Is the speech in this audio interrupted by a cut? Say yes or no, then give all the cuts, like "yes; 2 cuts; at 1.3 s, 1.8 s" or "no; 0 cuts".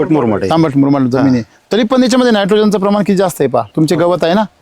yes; 1 cut; at 3.7 s